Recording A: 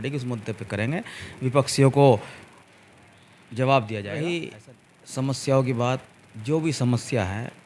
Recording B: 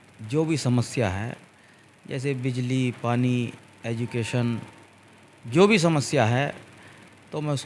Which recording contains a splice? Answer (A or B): A